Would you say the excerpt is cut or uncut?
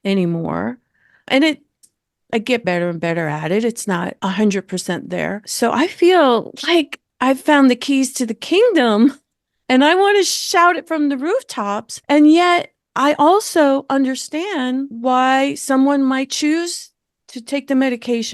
cut